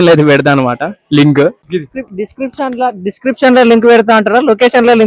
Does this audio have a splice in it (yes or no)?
yes